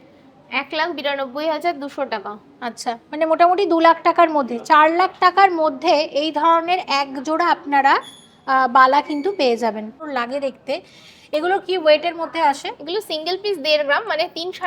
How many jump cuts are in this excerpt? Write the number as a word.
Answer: one